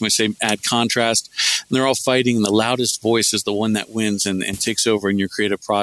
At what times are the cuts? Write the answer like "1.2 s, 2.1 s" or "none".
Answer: none